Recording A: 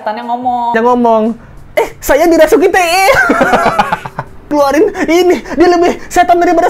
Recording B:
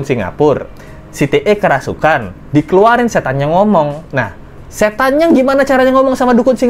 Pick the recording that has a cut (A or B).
A